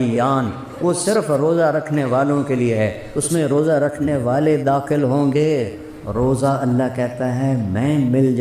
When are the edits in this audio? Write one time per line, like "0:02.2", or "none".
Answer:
0:05.7